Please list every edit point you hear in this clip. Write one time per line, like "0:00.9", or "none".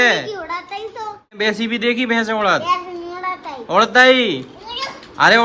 0:01.4